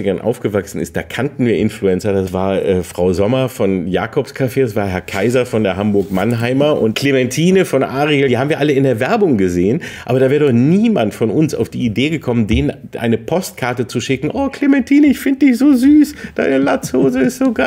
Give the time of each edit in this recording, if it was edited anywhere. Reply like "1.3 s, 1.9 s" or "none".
2.3 s, 6.9 s, 8.3 s